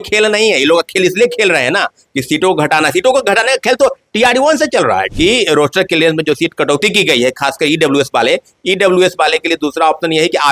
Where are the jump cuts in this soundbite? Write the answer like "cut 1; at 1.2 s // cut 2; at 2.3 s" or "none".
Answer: cut 1; at 5.1 s